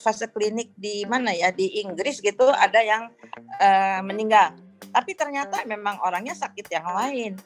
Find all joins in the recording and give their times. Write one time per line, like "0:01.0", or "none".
none